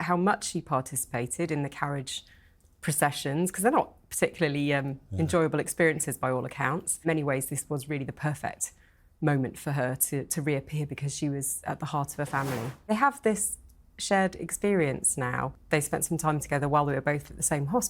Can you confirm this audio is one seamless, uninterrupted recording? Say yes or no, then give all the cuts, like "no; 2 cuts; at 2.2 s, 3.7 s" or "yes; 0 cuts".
no; 3 cuts; at 7.0 s, 12.8 s, 15.5 s